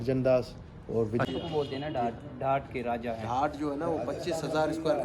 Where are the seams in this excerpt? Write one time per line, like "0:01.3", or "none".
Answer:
0:01.2